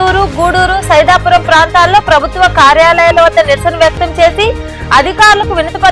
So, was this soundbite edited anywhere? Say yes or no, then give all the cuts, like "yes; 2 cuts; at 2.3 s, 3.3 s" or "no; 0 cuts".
no; 0 cuts